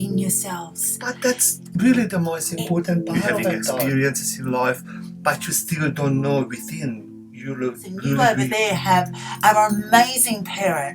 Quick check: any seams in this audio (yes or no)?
yes